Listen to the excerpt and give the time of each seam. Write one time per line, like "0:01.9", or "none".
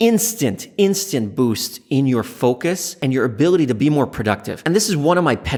none